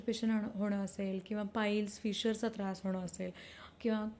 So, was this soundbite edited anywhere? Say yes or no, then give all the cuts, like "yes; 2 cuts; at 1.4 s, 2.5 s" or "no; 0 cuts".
no; 0 cuts